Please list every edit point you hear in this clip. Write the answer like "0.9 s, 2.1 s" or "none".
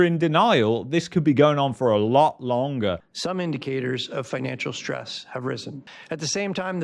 3.0 s